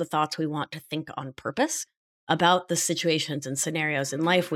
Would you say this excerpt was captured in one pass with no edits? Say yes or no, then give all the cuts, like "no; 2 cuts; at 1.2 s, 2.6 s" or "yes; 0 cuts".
yes; 0 cuts